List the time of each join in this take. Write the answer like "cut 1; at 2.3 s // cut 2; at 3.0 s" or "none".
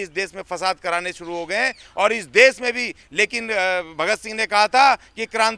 none